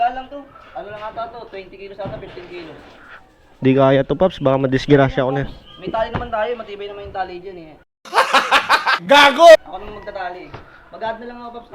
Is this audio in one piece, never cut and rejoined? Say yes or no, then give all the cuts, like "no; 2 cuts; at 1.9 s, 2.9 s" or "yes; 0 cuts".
yes; 0 cuts